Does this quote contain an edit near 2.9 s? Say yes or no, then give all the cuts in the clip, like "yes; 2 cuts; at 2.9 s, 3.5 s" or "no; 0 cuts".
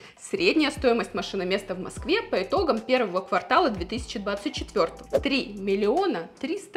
no; 1 cut; at 5.0 s